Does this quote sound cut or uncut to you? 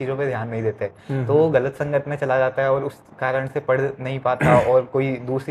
uncut